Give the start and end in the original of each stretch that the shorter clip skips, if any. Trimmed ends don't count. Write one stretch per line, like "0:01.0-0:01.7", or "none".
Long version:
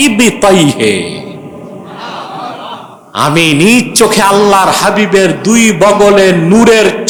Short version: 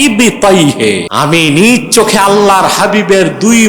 0:01.1-0:03.1